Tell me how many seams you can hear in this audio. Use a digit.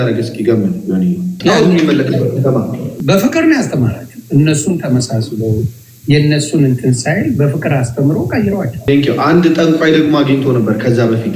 3